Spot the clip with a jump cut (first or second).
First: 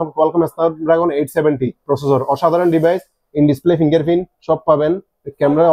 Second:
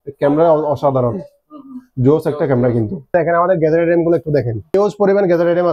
second